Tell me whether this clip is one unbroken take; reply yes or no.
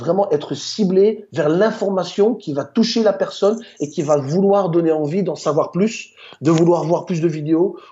yes